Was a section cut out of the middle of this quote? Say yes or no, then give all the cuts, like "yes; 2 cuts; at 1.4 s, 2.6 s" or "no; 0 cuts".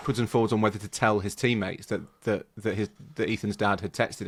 no; 0 cuts